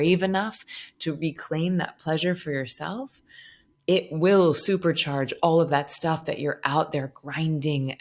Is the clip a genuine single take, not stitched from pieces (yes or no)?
yes